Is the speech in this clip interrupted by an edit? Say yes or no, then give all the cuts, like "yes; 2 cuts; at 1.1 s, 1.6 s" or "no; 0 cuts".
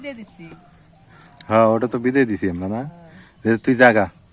no; 0 cuts